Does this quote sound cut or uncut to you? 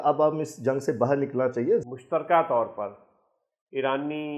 cut